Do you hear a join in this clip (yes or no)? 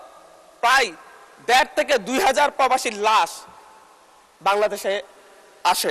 no